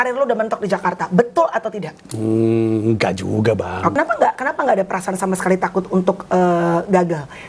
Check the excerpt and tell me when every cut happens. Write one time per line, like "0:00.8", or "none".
0:03.9